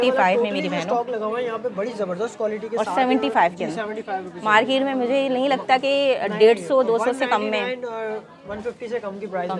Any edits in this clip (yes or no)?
no